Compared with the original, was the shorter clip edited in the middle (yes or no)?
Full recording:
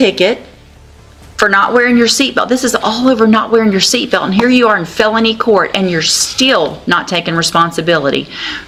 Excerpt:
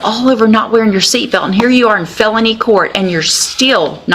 no